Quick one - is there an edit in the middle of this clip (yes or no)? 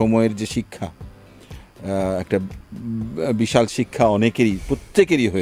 no